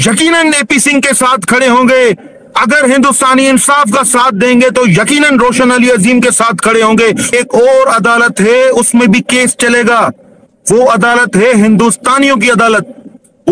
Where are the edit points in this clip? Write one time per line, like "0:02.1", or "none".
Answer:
0:07.3